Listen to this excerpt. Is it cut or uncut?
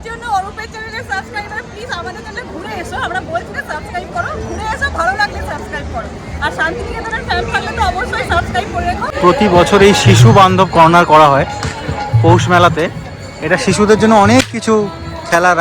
cut